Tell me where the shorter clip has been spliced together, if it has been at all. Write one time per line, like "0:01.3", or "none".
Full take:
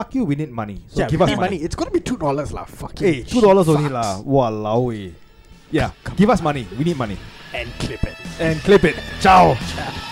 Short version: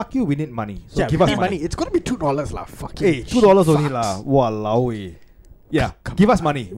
none